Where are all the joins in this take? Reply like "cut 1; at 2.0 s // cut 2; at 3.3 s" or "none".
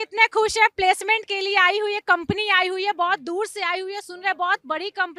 none